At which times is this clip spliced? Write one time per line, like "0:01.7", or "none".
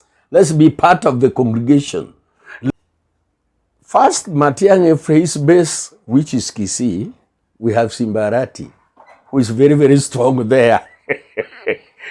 0:02.7